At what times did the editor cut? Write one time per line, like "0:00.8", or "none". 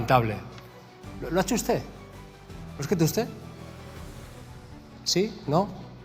none